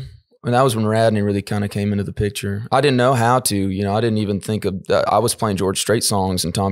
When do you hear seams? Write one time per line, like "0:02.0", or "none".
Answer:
none